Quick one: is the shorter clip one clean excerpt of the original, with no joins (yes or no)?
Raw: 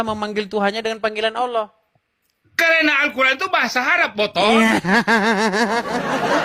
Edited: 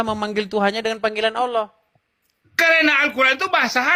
yes